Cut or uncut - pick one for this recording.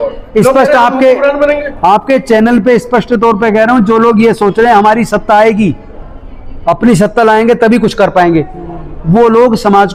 uncut